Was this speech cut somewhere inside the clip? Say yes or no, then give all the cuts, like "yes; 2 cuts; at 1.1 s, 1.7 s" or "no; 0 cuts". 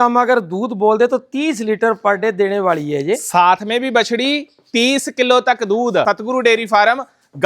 yes; 1 cut; at 6.0 s